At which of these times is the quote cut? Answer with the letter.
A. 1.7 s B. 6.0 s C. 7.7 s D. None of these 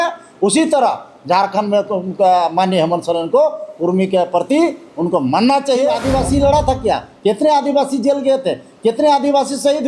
B